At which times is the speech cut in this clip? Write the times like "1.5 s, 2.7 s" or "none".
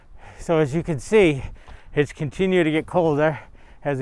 none